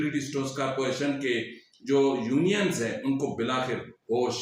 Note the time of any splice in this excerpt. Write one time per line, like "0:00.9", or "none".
none

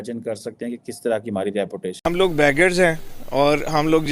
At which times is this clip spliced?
0:02.1

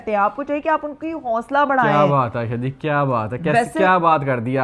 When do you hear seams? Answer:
none

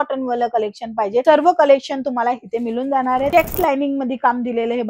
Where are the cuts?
0:03.3

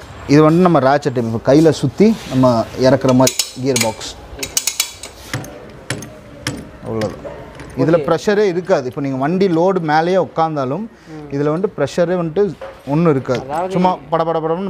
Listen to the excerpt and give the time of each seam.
0:05.2

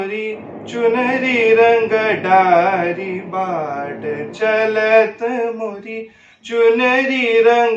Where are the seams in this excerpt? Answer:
none

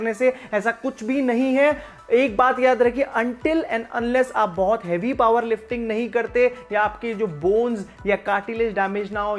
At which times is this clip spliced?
none

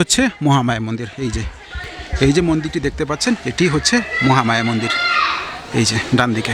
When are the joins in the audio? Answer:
none

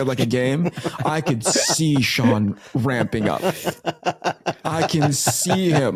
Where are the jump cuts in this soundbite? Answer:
none

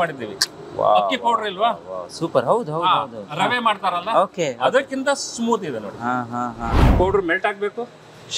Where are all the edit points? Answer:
0:06.9

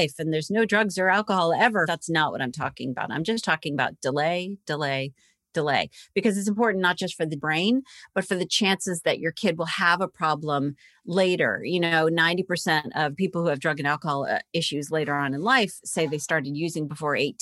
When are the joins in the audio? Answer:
0:01.9
0:07.4
0:13.1

